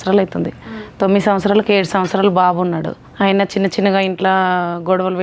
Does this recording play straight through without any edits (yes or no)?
no